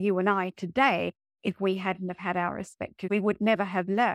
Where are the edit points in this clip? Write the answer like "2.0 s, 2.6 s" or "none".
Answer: 3.1 s